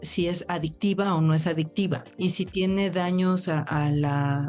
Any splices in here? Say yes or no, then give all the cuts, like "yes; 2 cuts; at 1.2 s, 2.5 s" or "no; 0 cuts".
yes; 1 cut; at 2.1 s